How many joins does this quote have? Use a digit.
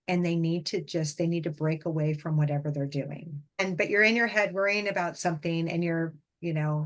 1